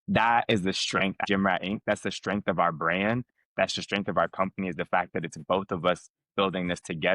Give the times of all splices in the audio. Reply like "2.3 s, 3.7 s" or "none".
1.2 s